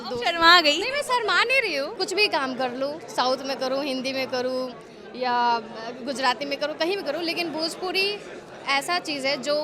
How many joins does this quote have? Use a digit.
1